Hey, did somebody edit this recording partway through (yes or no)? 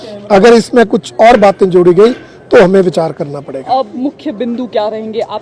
no